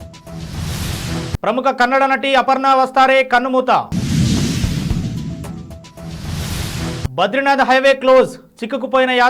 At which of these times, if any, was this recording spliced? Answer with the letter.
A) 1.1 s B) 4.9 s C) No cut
A